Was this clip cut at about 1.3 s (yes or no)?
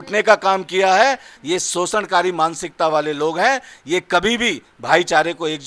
yes